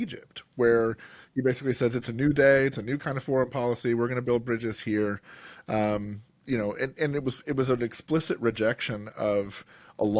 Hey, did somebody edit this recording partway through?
no; 0 cuts

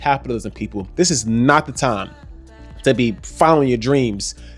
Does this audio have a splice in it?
no; 0 cuts

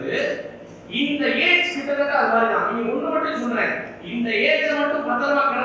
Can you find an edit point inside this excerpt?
no; 0 cuts

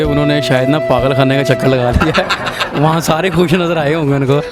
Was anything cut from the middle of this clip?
no; 0 cuts

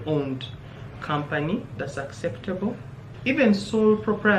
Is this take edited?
yes; 1 cut; at 3.1 s

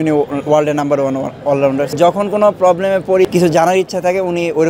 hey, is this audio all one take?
no; 2 cuts; at 1.9 s, 3.2 s

